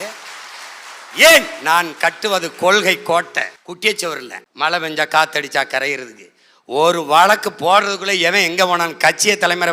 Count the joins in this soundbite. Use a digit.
2